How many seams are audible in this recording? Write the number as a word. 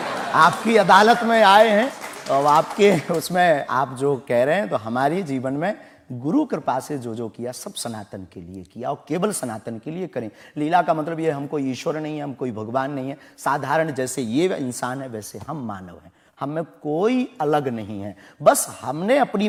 zero